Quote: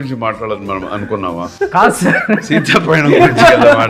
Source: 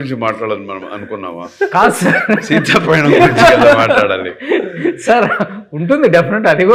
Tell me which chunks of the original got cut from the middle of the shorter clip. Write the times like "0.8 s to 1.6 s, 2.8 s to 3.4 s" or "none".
none